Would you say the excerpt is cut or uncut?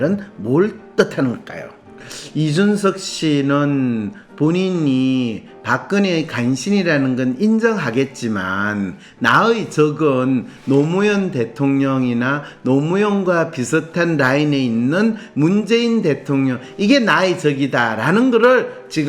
cut